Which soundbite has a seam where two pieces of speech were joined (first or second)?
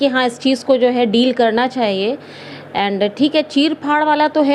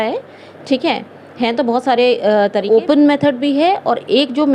second